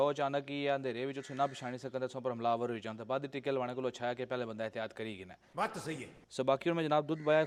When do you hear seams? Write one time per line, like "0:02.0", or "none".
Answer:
none